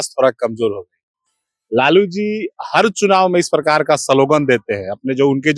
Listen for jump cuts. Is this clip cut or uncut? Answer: uncut